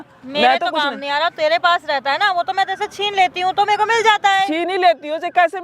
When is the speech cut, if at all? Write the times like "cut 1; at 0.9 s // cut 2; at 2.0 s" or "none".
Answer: none